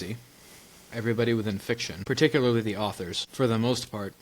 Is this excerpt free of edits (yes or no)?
no